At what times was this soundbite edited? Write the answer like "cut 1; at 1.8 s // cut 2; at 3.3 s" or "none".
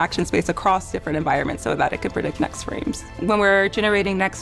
cut 1; at 3.2 s